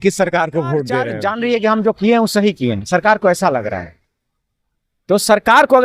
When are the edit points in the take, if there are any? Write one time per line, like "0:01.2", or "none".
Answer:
0:01.1

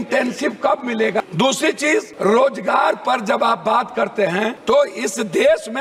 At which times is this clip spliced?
0:01.2
0:02.1
0:04.6

